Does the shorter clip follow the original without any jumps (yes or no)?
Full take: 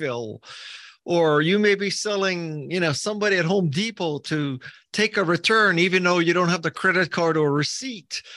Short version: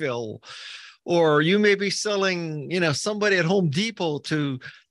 yes